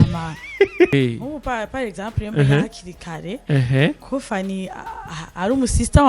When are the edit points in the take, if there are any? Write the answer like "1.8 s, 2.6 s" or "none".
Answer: 0.9 s